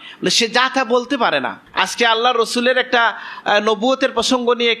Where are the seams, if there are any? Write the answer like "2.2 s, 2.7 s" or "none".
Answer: 1.6 s